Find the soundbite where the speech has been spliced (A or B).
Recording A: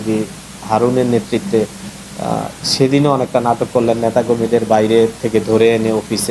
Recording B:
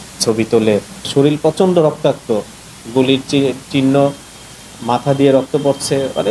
B